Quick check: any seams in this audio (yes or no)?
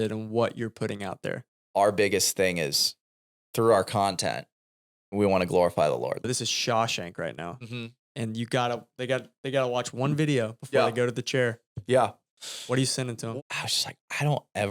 yes